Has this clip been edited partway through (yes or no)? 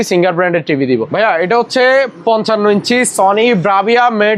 yes